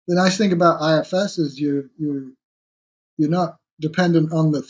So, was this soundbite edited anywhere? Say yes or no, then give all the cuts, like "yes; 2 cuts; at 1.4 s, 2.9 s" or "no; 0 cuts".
no; 0 cuts